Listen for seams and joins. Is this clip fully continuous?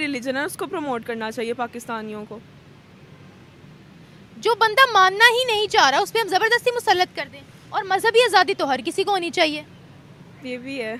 yes; 0 cuts

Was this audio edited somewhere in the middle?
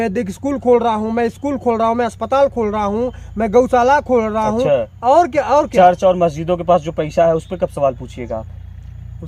no; 0 cuts

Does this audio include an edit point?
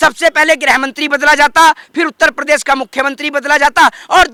no; 0 cuts

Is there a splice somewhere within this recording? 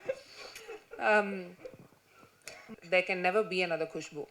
yes; 1 cut; at 2.6 s

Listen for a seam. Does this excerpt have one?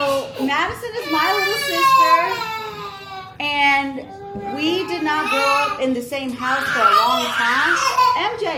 no; 0 cuts

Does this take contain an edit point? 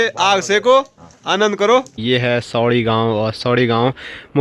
yes; 1 cut; at 1.9 s

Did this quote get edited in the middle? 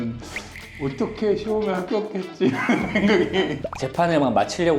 yes; 1 cut; at 3.6 s

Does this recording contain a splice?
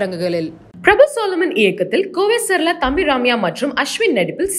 no; 0 cuts

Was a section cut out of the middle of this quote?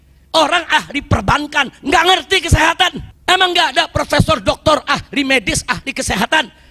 yes; 1 cut; at 3.1 s

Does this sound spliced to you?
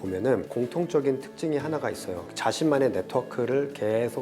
yes; 1 cut; at 2.2 s

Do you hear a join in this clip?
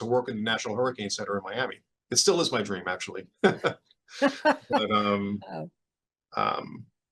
yes; 1 cut; at 1.9 s

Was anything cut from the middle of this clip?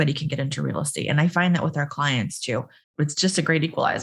yes; 1 cut; at 2.9 s

